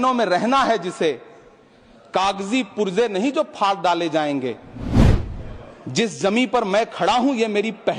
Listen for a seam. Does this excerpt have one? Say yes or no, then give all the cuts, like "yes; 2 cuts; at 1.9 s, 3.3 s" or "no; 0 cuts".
no; 0 cuts